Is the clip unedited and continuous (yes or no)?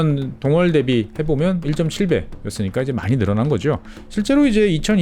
no